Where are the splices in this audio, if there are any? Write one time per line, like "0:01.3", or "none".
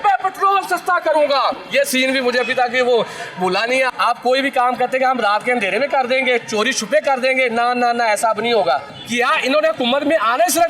0:01.6
0:03.9
0:08.9